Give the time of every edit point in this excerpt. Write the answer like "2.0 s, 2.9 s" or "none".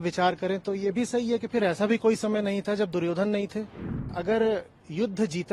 4.2 s